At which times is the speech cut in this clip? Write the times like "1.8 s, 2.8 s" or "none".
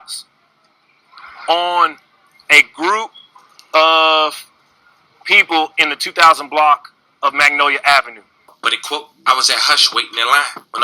8.8 s